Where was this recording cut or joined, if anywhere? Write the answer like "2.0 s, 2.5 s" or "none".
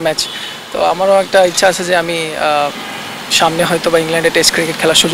none